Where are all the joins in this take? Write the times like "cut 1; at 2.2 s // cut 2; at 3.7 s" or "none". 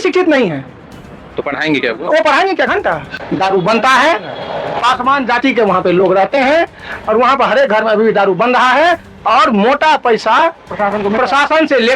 cut 1; at 3.2 s